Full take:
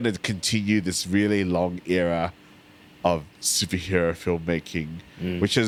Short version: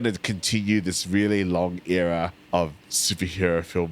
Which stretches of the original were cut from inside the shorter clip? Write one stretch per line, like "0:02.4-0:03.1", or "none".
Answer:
0:02.4-0:02.9